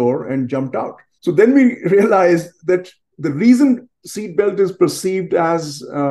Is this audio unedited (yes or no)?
no